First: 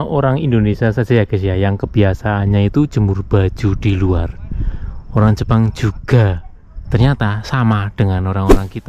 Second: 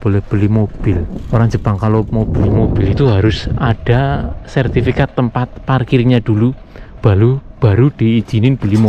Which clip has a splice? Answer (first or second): second